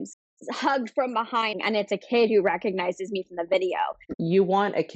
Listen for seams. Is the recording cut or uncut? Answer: cut